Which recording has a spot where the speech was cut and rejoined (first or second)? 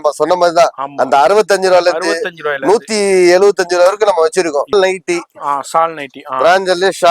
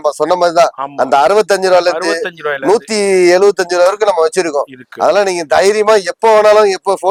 first